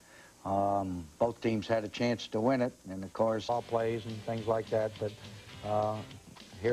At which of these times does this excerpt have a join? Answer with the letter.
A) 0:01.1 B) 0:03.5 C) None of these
C